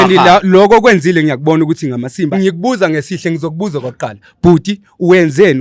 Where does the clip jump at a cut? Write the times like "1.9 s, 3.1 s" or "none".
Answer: none